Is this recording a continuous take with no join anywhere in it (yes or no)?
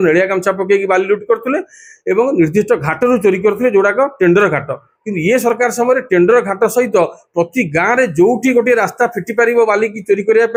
yes